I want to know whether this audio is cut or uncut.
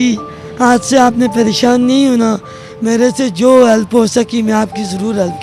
uncut